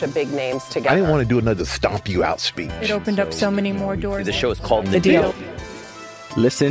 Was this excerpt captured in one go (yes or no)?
yes